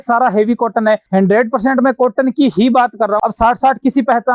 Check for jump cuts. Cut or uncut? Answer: cut